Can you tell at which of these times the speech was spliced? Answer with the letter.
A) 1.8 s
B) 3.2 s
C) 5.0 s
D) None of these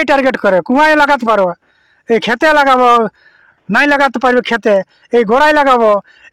D